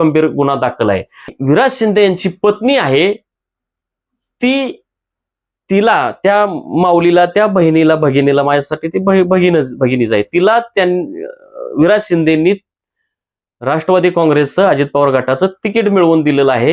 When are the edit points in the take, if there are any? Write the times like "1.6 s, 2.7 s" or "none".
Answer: 1.3 s